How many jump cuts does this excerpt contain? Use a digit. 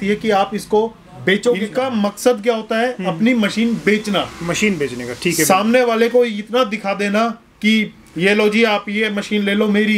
1